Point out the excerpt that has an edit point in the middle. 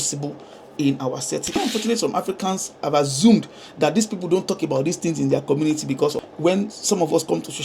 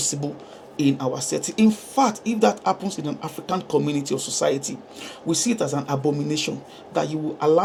first; 2 cuts; at 1.5 s, 6.2 s

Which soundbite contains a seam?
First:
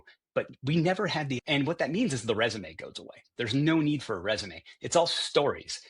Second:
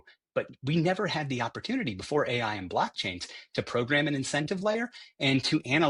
first; 1 cut; at 1.3 s

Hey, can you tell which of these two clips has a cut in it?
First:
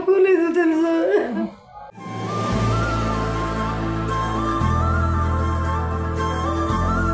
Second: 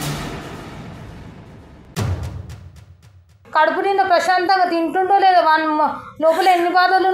second; 1 cut; at 3.4 s

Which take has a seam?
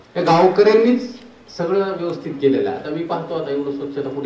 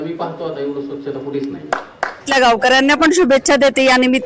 second; 1 cut; at 2.3 s

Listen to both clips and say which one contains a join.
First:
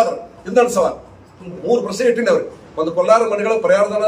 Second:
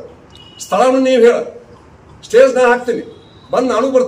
first; 1 cut; at 1.6 s

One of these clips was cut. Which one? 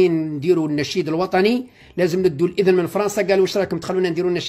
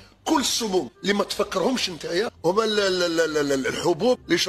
second; 1 cut; at 2.3 s

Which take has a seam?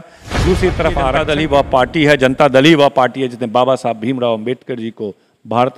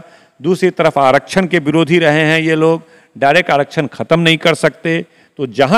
first; 1 cut; at 1.1 s

